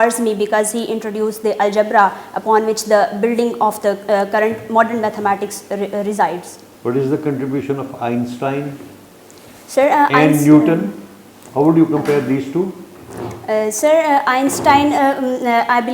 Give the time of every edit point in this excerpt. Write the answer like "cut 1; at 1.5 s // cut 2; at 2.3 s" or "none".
none